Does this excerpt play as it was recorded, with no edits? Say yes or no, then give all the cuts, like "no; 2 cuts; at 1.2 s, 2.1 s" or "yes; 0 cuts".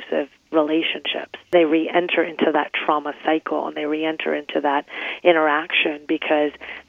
no; 1 cut; at 1.5 s